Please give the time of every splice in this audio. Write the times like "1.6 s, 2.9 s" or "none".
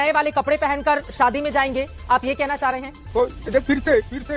3.1 s